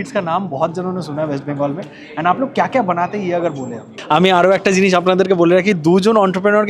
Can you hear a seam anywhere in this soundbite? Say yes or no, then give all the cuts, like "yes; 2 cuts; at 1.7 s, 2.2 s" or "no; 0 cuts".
yes; 1 cut; at 4.0 s